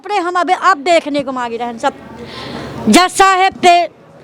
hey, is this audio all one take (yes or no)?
yes